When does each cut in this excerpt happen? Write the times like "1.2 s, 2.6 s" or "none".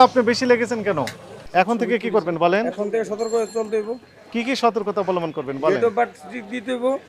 1.4 s